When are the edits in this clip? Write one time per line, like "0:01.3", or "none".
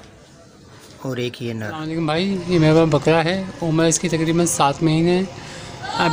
0:02.0